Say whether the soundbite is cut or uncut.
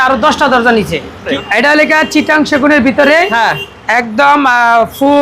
cut